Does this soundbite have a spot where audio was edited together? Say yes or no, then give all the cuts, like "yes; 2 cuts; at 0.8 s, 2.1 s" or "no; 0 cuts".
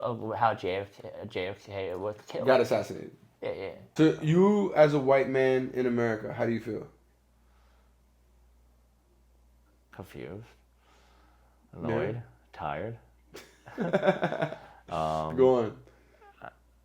yes; 1 cut; at 3.8 s